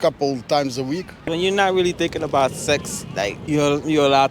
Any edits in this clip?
yes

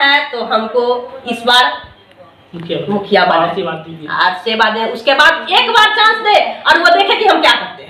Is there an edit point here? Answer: no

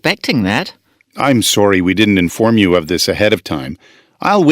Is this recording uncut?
no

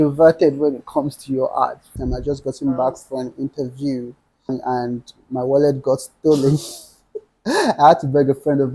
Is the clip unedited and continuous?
no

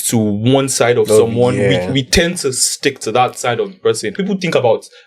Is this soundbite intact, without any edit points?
no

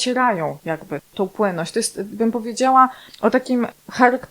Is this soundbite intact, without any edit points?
no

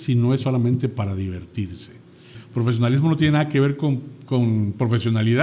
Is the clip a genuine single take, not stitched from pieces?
no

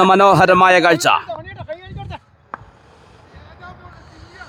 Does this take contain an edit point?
no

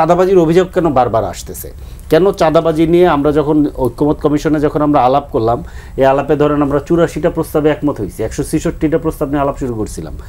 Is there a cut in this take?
no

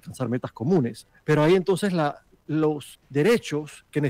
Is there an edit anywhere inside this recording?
yes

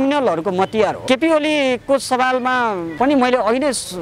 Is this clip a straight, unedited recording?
no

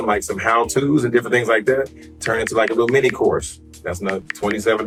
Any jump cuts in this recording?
no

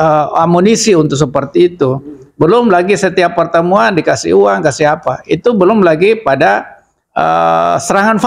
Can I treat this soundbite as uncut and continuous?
yes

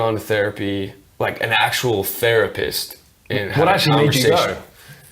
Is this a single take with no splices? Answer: no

